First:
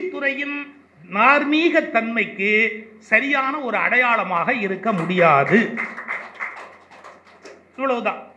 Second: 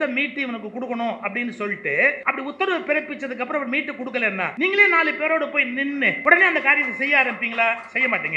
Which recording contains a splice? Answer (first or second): second